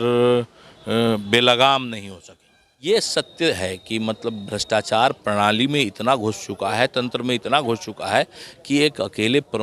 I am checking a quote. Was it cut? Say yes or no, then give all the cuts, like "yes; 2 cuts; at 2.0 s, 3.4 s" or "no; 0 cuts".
yes; 1 cut; at 2.8 s